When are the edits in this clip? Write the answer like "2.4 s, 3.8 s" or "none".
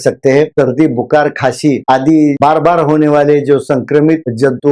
none